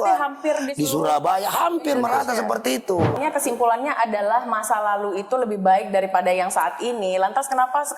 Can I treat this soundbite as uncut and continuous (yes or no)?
no